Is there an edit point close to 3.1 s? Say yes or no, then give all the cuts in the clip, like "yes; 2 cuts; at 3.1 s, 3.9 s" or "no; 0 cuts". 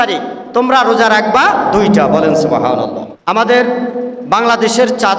yes; 1 cut; at 3.1 s